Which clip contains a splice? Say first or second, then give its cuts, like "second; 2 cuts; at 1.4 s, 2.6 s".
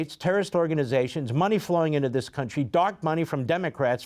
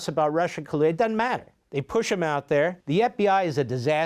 second; 2 cuts; at 1.6 s, 2.8 s